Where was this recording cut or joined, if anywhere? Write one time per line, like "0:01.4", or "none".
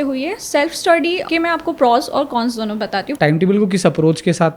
0:01.2
0:03.1